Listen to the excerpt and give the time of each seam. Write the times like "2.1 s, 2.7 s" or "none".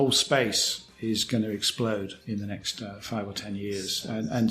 2.2 s